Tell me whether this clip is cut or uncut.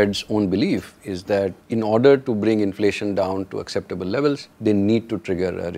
cut